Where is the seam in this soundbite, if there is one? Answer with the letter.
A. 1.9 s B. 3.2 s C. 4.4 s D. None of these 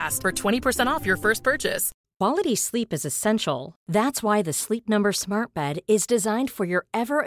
A